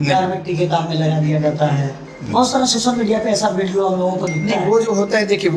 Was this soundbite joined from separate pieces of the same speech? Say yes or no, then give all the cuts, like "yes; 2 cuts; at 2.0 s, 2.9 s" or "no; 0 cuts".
no; 0 cuts